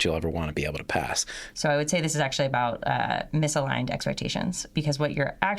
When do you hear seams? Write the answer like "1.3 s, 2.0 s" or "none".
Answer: 1.4 s, 4.7 s